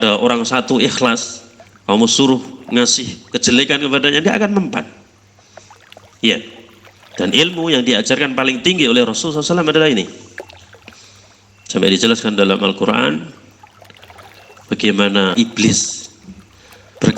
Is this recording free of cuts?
no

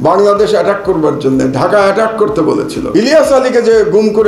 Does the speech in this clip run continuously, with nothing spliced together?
no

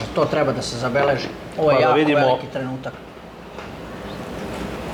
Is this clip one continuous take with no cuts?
yes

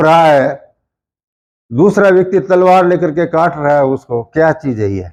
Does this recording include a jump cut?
no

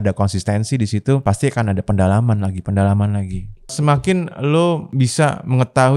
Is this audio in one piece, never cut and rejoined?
no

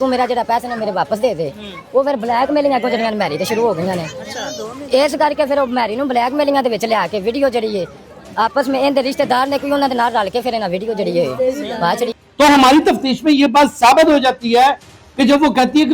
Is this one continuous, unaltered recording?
yes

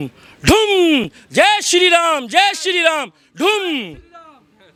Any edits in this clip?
no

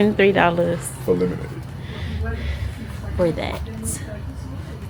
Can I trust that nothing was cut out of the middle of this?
yes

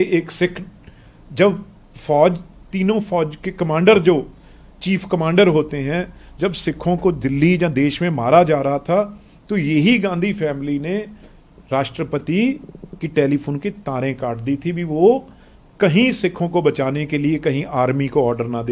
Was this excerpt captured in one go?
yes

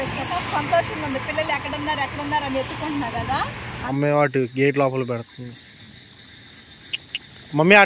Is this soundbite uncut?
no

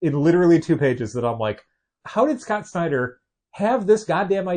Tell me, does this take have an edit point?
yes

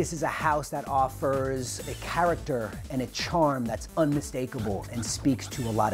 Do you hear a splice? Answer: yes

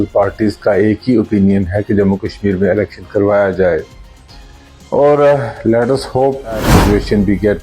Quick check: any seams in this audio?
yes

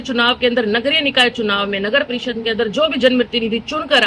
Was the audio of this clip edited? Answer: no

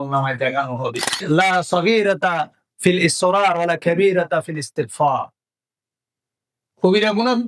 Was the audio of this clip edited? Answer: yes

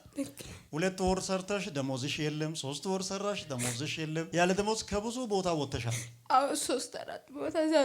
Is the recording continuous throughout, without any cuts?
yes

